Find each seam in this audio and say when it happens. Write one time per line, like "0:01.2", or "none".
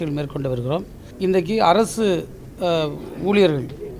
0:01.1